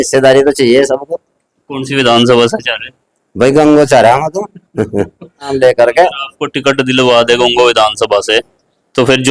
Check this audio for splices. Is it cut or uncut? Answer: cut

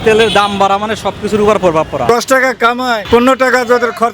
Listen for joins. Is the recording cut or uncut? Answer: cut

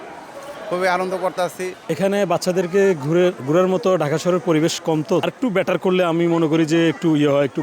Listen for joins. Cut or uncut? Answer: cut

